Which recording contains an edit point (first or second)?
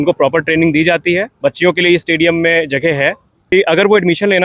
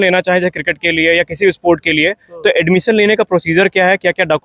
first